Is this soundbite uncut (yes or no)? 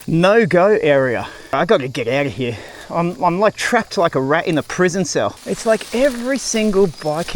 no